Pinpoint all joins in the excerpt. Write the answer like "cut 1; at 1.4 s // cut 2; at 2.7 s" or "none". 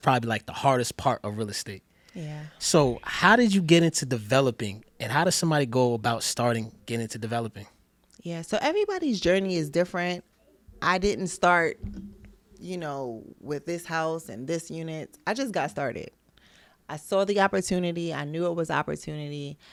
none